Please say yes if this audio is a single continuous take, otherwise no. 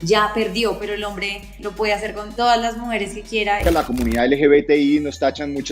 no